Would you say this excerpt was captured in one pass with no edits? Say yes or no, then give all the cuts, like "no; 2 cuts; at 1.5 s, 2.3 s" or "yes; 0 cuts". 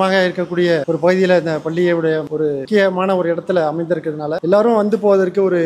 yes; 0 cuts